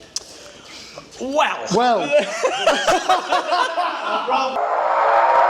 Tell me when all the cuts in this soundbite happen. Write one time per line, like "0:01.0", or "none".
0:04.5

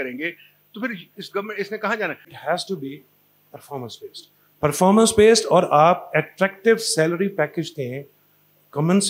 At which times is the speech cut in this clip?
0:02.3

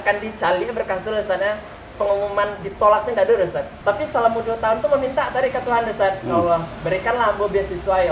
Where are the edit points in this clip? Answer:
0:03.7

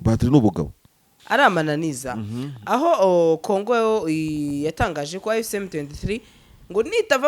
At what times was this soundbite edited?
0:01.2

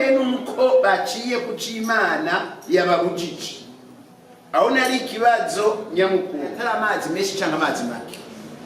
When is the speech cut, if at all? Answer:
0:06.6

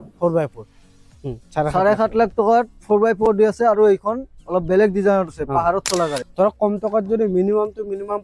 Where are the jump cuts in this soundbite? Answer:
0:01.1
0:06.2

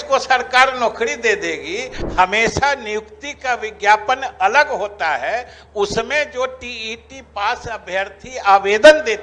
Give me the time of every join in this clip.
0:02.0

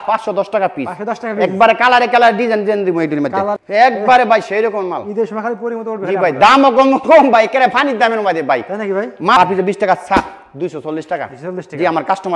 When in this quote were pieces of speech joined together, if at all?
0:03.6
0:09.4

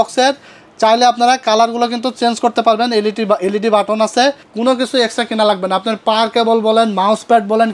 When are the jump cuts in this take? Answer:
0:04.5

